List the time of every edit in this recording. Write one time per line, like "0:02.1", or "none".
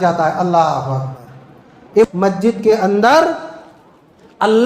0:01.9